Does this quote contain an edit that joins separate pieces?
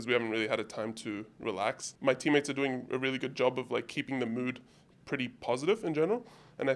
yes; 1 cut; at 1.9 s

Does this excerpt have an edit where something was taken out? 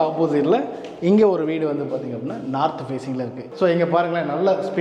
yes; 1 cut; at 3.4 s

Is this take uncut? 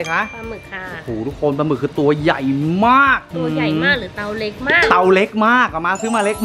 yes; 0 cuts

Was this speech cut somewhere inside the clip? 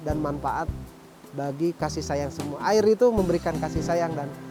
no; 0 cuts

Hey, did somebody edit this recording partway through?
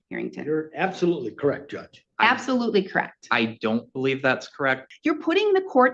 yes; 1 cut; at 4.9 s

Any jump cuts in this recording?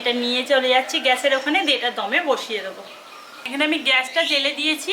no; 0 cuts

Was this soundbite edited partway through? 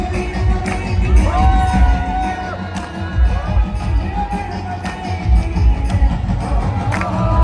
no; 0 cuts

